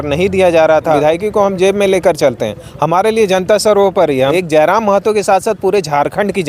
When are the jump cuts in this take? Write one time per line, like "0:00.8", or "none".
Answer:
0:01.0
0:04.3